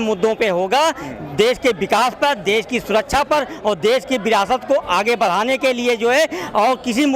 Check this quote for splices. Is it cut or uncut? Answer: uncut